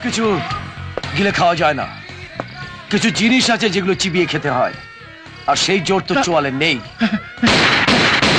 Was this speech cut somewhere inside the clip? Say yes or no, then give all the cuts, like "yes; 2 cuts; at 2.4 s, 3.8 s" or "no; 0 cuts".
no; 0 cuts